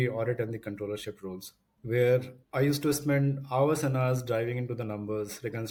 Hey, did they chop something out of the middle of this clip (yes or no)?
no